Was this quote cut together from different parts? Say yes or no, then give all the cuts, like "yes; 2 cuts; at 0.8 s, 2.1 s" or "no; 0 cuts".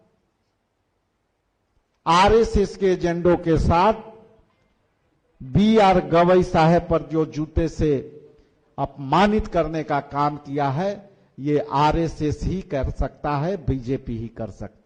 no; 0 cuts